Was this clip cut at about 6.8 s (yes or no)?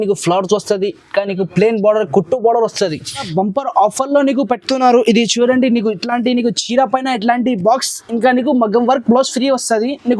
no